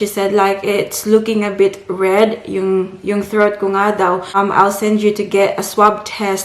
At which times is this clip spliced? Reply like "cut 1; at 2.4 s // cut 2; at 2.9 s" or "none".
cut 1; at 4.4 s

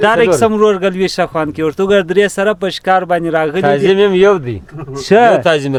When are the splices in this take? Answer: none

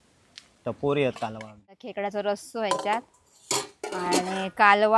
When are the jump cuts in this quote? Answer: cut 1; at 1.9 s

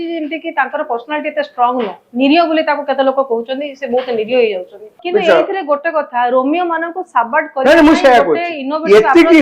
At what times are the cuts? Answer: cut 1; at 5.0 s

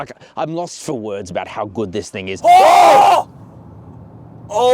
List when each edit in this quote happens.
cut 1; at 2.3 s

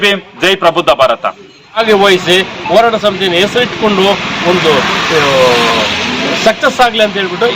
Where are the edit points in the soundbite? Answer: cut 1; at 1.8 s

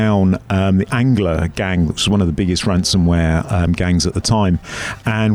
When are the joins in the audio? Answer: none

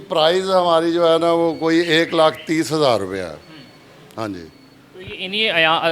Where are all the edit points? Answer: none

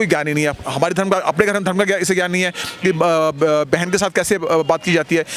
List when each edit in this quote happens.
none

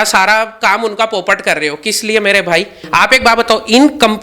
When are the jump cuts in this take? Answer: cut 1; at 2.8 s

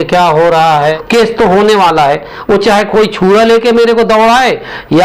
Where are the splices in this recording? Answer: cut 1; at 1.0 s

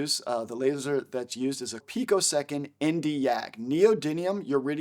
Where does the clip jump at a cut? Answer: cut 1; at 1.9 s

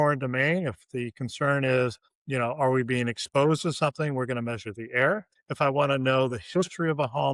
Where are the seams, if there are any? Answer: none

